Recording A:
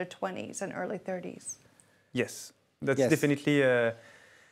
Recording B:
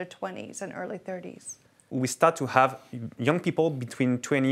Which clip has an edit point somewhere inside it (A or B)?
B